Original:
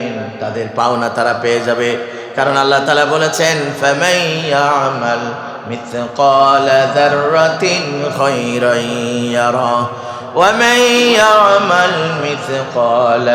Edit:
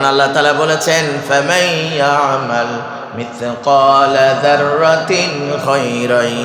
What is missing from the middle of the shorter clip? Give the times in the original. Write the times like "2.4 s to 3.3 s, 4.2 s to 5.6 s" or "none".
none